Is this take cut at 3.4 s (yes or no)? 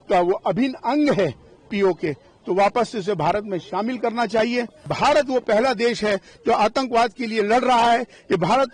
no